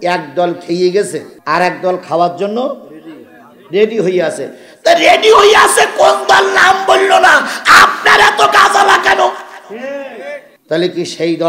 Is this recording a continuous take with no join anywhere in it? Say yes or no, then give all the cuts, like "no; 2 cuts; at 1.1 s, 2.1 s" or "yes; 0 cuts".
no; 2 cuts; at 1.3 s, 10.5 s